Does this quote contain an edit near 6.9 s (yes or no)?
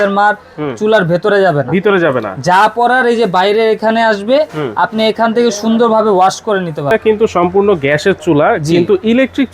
yes